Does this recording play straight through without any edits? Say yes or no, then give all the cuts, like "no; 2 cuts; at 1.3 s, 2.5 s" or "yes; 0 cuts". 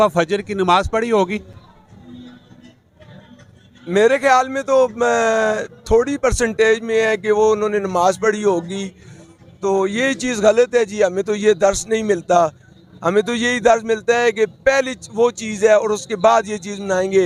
yes; 0 cuts